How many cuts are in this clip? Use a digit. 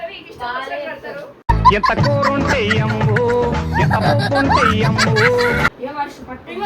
1